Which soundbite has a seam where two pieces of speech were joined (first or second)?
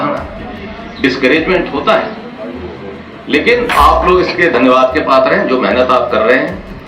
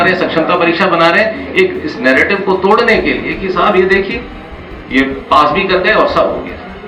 first